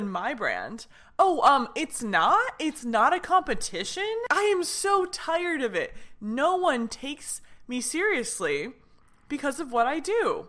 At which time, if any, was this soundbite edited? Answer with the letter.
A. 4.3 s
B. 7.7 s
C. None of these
A